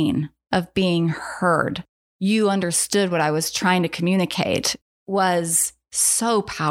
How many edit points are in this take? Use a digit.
1